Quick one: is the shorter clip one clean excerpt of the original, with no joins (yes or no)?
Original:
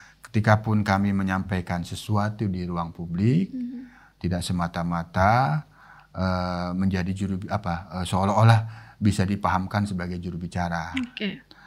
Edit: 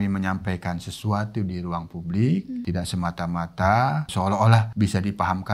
no